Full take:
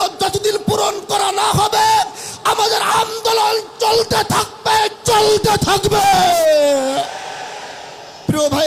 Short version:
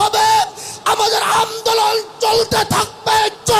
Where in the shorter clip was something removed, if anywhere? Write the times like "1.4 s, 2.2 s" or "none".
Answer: none